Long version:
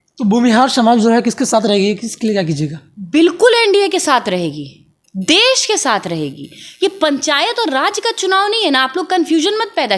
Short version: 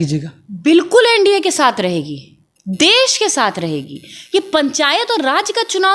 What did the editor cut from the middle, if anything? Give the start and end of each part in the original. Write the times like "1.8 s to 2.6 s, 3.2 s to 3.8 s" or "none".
none